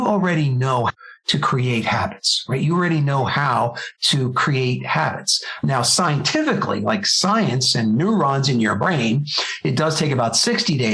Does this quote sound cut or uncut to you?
uncut